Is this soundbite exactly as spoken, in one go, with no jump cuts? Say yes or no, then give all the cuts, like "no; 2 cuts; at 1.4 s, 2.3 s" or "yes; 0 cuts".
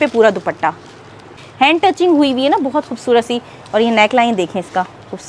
no; 1 cut; at 1.4 s